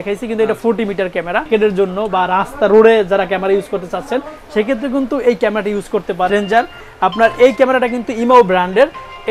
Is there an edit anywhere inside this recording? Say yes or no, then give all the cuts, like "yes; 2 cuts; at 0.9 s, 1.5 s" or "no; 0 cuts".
yes; 2 cuts; at 1.5 s, 6.3 s